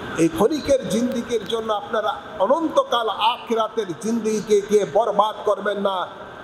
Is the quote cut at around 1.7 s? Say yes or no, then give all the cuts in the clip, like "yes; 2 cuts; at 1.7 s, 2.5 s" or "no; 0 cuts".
no; 0 cuts